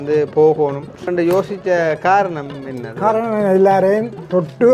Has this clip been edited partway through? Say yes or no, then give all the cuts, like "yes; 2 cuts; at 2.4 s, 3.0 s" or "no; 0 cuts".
yes; 1 cut; at 1.1 s